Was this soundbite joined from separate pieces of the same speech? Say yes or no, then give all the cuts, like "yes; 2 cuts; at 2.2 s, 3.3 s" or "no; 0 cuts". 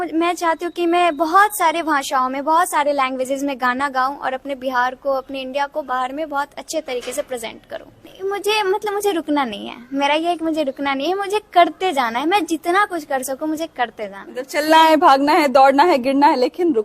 no; 0 cuts